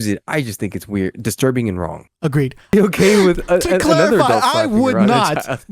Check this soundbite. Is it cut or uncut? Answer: cut